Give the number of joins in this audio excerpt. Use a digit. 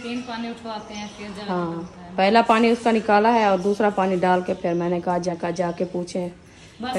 1